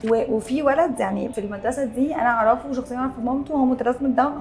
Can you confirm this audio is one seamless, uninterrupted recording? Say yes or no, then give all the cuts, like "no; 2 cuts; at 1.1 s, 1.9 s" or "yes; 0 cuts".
no; 1 cut; at 1.3 s